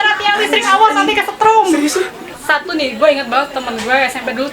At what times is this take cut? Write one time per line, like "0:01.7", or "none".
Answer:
0:02.3